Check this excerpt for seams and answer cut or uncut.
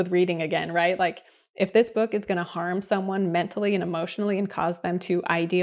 uncut